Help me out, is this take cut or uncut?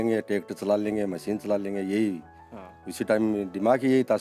uncut